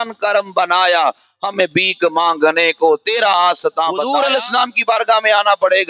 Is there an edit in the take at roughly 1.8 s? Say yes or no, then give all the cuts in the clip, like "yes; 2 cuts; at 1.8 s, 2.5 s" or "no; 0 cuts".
no; 1 cut; at 4.1 s